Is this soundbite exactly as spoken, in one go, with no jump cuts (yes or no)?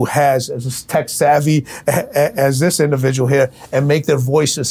yes